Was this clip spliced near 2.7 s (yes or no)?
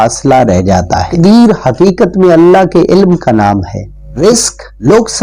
no